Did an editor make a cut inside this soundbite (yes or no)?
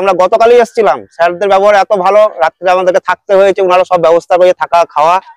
no